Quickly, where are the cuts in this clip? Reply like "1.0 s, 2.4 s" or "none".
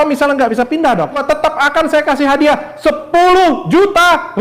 1.2 s

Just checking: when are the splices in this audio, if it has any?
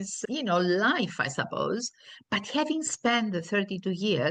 none

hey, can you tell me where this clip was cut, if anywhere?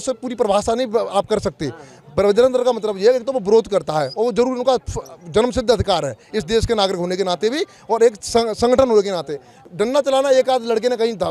none

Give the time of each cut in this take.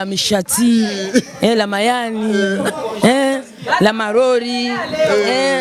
none

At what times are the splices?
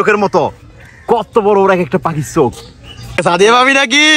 3.0 s

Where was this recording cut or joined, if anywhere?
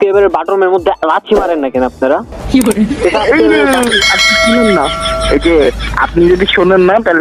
none

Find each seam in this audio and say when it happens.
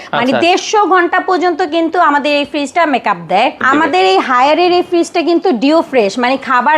3.6 s

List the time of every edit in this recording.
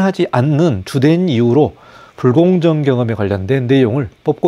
none

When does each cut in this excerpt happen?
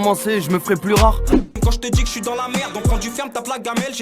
1.4 s

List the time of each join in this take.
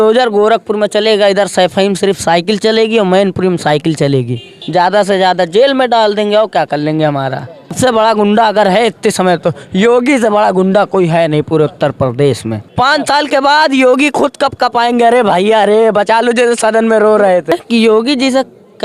4.5 s, 7.8 s, 12.6 s, 17.5 s

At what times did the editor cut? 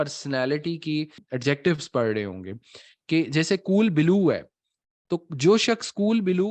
1.2 s

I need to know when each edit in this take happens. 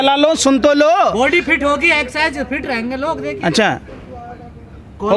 none

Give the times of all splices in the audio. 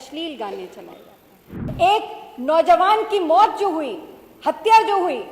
1.6 s

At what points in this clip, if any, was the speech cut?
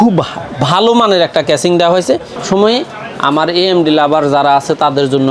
2.4 s

